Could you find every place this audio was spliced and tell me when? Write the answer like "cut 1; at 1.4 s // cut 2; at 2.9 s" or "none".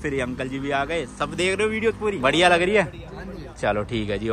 none